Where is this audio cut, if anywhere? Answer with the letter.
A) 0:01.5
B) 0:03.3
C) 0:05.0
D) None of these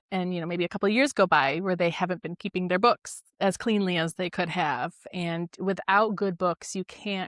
D